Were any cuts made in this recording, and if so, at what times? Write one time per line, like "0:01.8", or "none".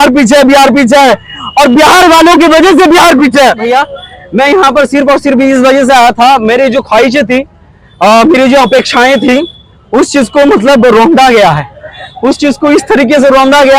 0:03.7